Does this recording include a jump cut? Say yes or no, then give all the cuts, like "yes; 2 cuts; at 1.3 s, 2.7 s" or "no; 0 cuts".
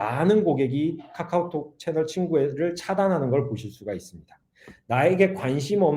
no; 0 cuts